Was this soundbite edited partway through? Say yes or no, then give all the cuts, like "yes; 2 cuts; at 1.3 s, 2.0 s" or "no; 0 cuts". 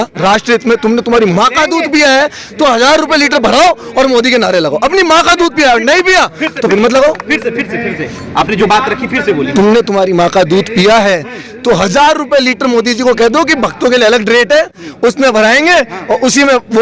no; 0 cuts